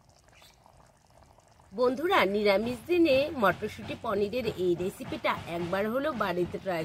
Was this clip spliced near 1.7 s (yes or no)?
yes